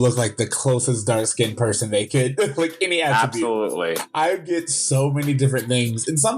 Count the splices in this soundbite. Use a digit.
1